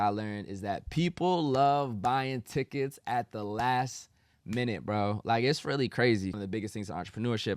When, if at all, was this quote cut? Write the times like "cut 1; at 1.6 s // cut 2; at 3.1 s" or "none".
cut 1; at 6.3 s